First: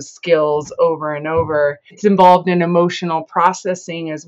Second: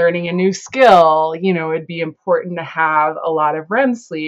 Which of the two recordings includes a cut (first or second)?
first